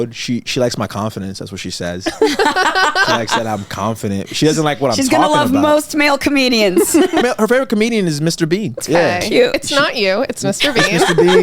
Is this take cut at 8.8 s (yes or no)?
yes